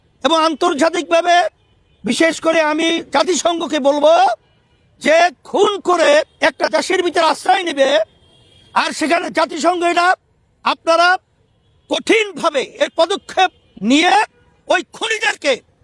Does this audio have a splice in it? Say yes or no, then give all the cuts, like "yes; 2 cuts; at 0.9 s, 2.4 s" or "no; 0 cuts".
no; 0 cuts